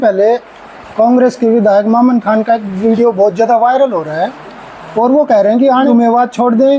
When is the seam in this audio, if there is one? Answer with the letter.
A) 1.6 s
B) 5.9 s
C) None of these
B